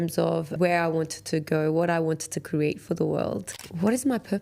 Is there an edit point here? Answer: yes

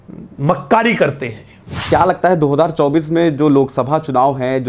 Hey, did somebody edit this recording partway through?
yes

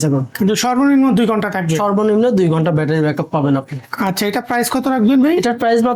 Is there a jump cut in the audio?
no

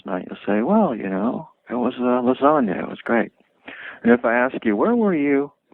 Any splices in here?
no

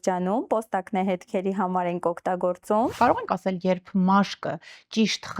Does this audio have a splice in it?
yes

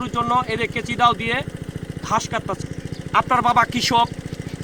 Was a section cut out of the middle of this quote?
yes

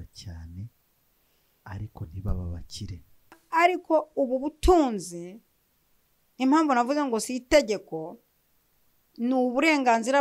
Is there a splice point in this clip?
yes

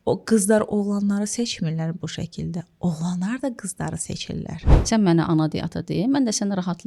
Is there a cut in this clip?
yes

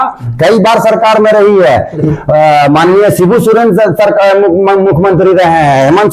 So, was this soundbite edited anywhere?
yes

